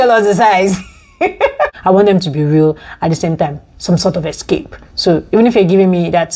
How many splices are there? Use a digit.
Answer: 1